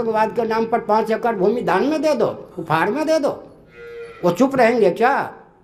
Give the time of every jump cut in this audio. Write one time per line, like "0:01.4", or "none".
none